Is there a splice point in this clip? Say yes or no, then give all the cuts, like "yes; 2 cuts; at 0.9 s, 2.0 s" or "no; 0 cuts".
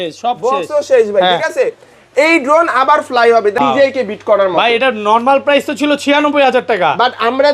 yes; 1 cut; at 3.6 s